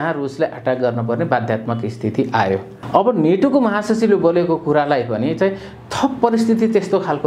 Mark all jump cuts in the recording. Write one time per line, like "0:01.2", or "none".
0:02.7